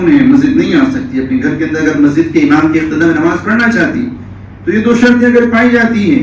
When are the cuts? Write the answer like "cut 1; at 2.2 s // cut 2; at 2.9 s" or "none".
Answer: none